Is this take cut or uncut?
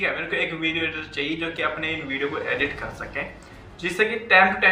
uncut